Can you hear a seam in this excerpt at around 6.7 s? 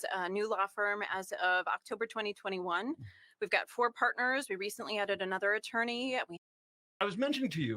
yes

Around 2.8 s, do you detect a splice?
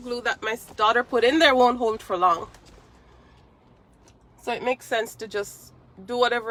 no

